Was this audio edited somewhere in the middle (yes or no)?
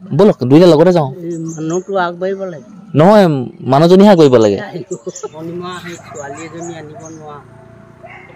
yes